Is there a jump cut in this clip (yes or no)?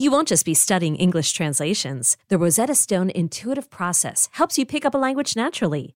no